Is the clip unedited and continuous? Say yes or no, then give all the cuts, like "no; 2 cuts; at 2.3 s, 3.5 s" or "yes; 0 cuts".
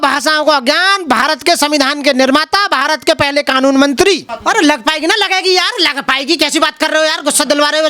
no; 1 cut; at 4.3 s